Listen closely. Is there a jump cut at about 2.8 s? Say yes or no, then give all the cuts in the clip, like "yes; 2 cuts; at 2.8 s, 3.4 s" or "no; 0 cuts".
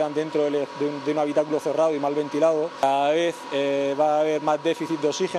yes; 1 cut; at 2.8 s